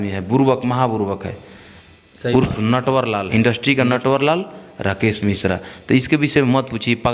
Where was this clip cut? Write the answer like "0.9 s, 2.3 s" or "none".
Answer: 3.2 s